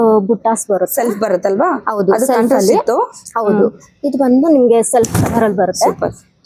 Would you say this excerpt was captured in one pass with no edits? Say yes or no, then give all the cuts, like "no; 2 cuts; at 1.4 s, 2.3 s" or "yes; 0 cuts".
yes; 0 cuts